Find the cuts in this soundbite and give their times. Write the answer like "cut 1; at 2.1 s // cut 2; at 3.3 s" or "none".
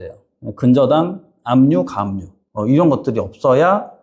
none